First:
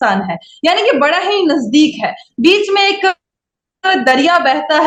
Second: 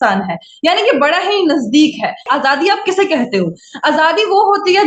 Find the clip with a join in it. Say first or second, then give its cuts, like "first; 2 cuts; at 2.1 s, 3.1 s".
second; 1 cut; at 2.3 s